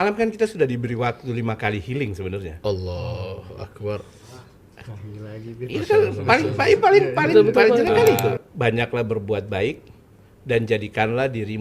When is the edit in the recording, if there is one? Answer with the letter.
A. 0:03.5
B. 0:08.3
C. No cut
B